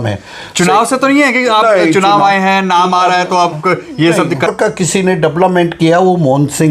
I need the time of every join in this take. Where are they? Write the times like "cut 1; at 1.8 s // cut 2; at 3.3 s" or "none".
cut 1; at 4.5 s